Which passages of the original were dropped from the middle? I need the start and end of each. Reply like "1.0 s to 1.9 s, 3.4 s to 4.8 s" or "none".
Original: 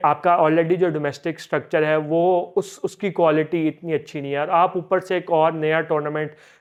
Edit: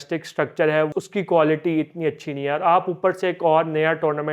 2.0 s to 2.8 s